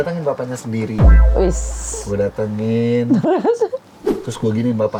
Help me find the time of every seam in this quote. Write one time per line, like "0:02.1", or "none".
none